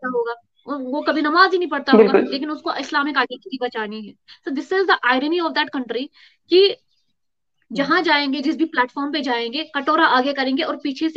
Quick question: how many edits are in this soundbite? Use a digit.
0